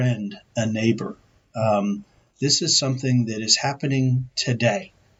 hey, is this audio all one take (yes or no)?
yes